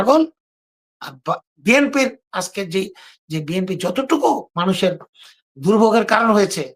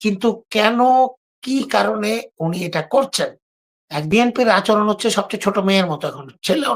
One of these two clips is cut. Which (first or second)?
second